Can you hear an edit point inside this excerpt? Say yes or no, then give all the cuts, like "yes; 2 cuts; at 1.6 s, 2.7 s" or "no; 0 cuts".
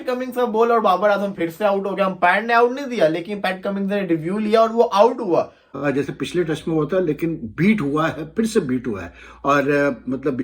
yes; 1 cut; at 5.6 s